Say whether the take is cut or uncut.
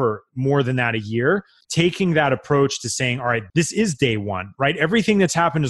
cut